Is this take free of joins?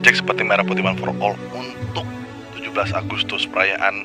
yes; 0 cuts

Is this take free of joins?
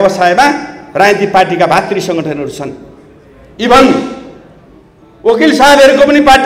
yes; 0 cuts

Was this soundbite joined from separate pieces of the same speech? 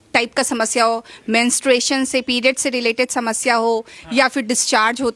no; 0 cuts

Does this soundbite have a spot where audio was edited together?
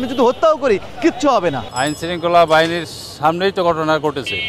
yes; 1 cut; at 1.7 s

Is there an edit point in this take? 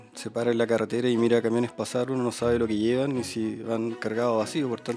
no; 0 cuts

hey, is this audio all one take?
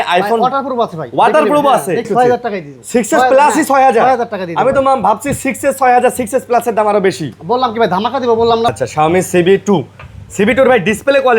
no; 2 cuts; at 2.1 s, 8.7 s

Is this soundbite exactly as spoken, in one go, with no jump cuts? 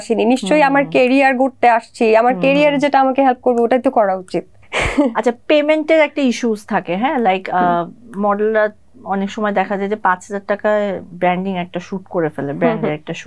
yes; 0 cuts

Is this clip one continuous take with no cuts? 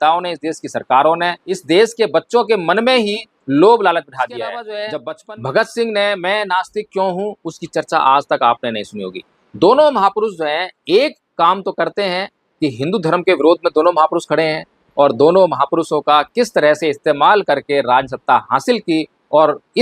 no; 2 cuts; at 1.5 s, 4.8 s

